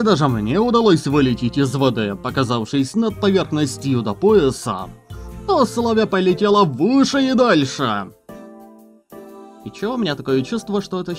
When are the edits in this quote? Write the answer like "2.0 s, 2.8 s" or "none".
none